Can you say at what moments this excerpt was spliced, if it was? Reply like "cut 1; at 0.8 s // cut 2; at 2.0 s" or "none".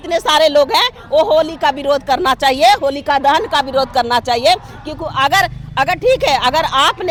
none